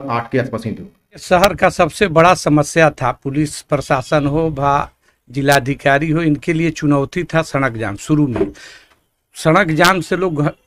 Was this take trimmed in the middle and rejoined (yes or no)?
yes